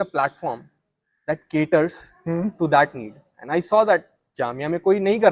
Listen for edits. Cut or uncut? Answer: uncut